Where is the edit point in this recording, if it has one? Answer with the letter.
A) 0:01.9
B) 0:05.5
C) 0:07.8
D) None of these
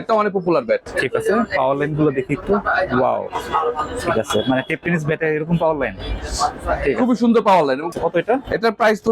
C